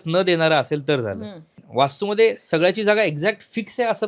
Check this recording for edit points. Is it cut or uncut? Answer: cut